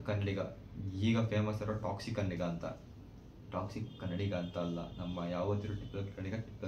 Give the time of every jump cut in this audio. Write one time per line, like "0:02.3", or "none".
none